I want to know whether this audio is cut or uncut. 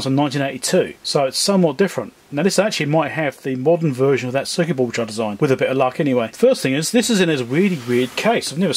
cut